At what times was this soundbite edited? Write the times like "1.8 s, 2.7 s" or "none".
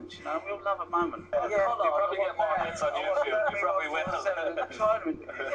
1.3 s